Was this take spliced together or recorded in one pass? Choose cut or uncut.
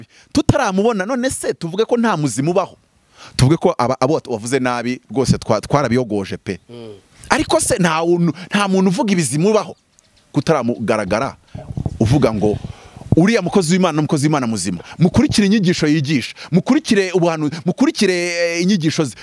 uncut